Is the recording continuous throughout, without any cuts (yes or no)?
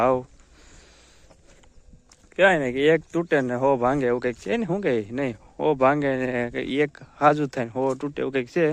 yes